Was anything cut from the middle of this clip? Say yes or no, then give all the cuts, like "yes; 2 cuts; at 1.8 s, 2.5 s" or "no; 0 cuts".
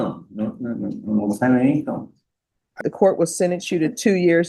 yes; 1 cut; at 2.8 s